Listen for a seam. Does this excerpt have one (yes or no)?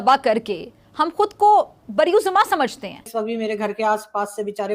yes